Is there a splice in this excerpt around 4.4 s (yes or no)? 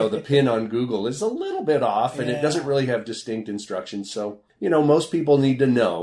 yes